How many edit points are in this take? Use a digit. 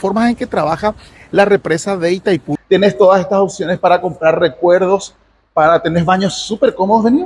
1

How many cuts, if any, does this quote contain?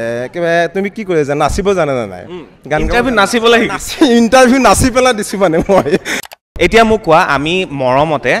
1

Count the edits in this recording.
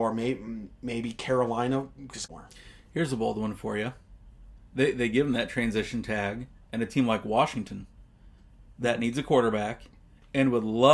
1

